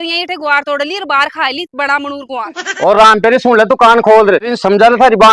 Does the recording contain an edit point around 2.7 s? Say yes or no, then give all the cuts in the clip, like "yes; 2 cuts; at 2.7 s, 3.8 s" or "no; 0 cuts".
yes; 1 cut; at 2.7 s